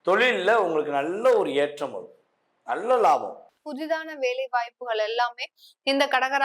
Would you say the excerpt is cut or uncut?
cut